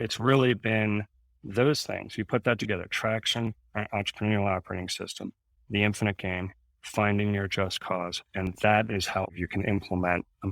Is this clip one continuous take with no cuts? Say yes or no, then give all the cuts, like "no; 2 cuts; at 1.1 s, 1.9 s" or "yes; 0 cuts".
no; 1 cut; at 9.3 s